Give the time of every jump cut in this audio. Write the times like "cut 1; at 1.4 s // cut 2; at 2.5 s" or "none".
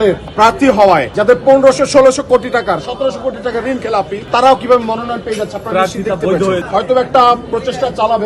cut 1; at 1.1 s // cut 2; at 6.7 s